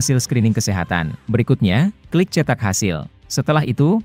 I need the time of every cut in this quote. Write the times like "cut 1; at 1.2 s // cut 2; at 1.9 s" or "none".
cut 1; at 1.2 s // cut 2; at 3.2 s